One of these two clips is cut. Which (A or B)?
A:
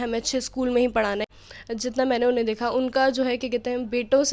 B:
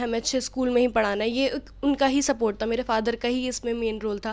A